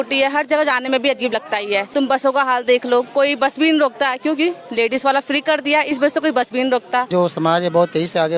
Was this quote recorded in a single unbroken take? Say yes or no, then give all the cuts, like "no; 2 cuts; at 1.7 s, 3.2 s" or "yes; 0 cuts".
no; 2 cuts; at 1.9 s, 7.1 s